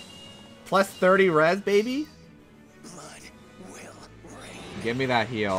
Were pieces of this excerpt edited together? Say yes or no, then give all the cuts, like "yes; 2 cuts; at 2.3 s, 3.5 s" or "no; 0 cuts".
no; 0 cuts